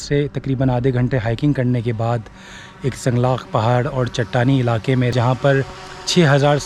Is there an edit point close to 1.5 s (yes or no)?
no